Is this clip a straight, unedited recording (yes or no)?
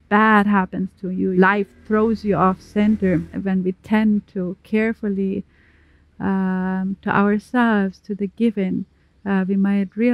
no